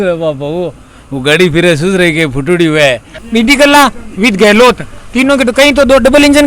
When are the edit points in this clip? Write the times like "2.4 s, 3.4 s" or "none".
3.1 s